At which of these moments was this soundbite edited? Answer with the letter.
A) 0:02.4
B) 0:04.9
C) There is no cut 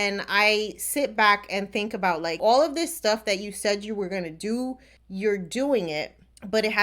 A